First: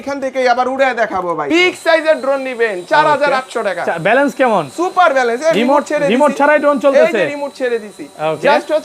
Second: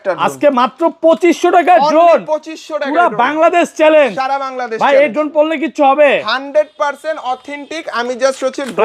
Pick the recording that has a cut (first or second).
first